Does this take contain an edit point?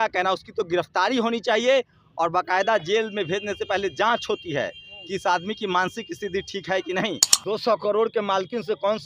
yes; 1 cut; at 7.3 s

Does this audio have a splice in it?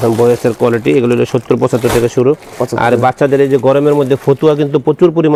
no; 0 cuts

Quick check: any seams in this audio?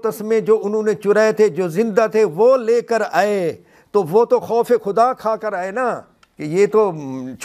no; 0 cuts

